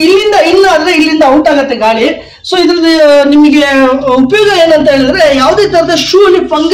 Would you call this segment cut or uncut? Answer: uncut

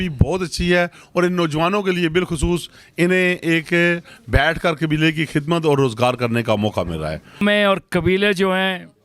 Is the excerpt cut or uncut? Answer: cut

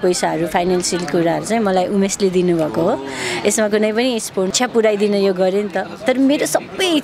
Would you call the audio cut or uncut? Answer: cut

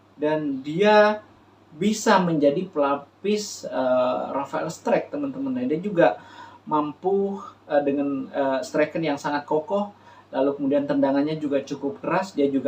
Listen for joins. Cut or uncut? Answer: uncut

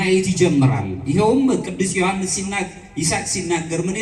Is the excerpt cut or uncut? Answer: uncut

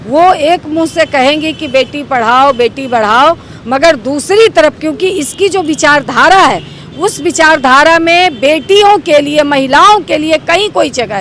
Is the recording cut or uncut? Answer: uncut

